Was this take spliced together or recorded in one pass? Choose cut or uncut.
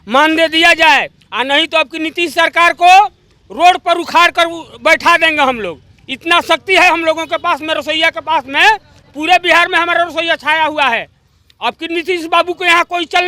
uncut